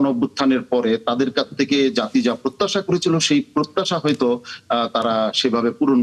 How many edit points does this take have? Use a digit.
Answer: 0